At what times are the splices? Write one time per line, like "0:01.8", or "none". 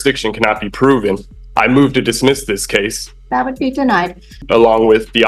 0:03.0
0:04.4